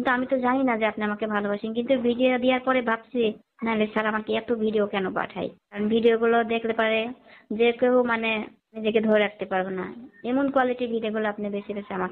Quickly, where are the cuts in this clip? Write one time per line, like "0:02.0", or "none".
0:03.5
0:05.8
0:08.8